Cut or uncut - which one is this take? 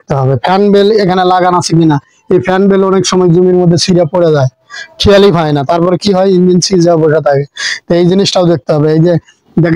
uncut